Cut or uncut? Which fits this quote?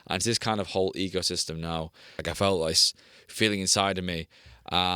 cut